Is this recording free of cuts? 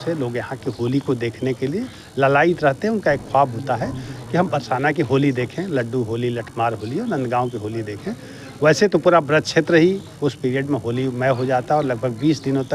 yes; 0 cuts

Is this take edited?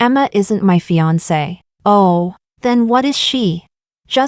no; 0 cuts

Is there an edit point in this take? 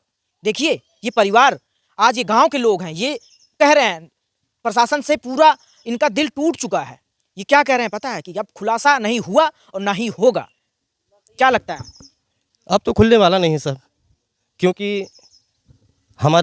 no; 0 cuts

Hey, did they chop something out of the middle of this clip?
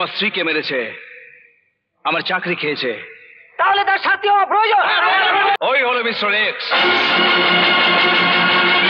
yes; 1 cut; at 5.6 s

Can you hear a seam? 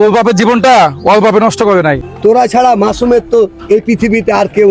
yes; 1 cut; at 2.1 s

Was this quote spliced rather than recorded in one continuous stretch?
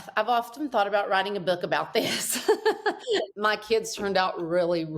yes; 1 cut; at 2.9 s

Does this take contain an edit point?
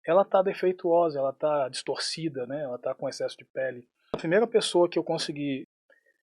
yes; 1 cut; at 4.2 s

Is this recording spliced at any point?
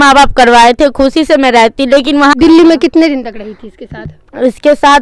yes; 1 cut; at 2.3 s

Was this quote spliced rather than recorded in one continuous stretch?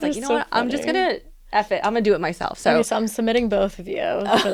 no; 0 cuts

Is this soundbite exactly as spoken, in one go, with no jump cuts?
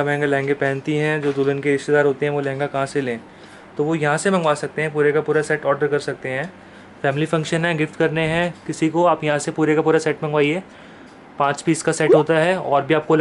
yes; 0 cuts

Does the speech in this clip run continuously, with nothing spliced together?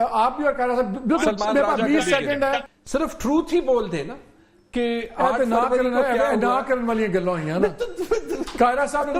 no; 1 cut; at 2.7 s

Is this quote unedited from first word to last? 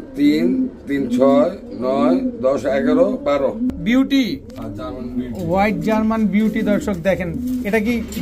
no; 1 cut; at 3.7 s

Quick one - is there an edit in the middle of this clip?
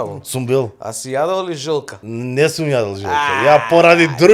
no; 0 cuts

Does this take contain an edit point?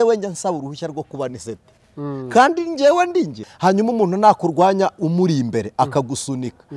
yes; 1 cut; at 3.4 s

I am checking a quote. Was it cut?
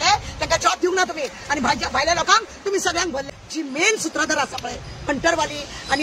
yes; 1 cut; at 3.4 s

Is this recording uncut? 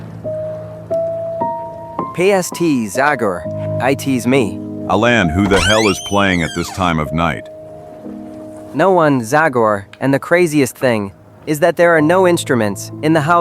no; 1 cut; at 8.6 s

